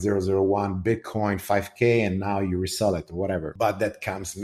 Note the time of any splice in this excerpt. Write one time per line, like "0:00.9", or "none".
0:03.5